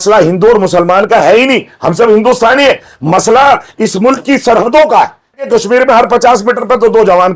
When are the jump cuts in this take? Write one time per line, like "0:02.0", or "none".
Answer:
0:05.5